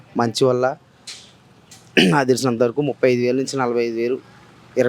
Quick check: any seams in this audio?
no; 0 cuts

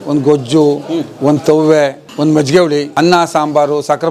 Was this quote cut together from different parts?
yes; 2 cuts; at 2.0 s, 2.9 s

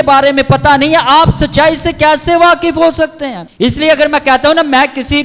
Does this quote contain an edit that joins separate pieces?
no; 0 cuts

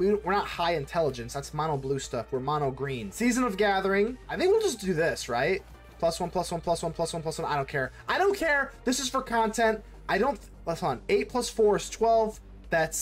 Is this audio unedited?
no; 2 cuts; at 3.1 s, 4.2 s

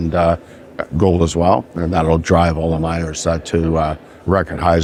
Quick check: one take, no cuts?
yes; 0 cuts

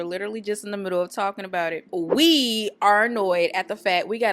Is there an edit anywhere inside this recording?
yes; 1 cut; at 1.8 s

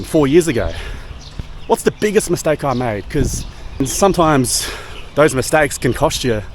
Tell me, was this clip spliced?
yes; 1 cut; at 3.8 s

